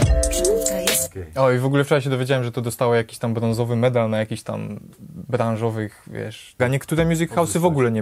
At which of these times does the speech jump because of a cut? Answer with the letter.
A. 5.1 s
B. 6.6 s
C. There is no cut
B